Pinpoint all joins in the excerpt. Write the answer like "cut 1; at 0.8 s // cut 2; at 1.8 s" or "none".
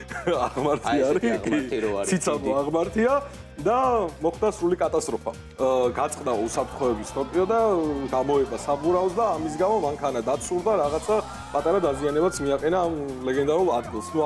cut 1; at 5.4 s